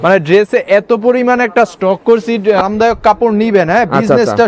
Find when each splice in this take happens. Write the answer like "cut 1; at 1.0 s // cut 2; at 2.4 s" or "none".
cut 1; at 2.6 s